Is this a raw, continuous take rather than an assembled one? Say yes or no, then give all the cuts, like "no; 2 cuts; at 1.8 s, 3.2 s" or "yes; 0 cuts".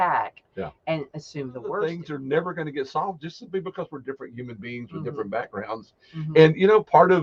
no; 1 cut; at 1.8 s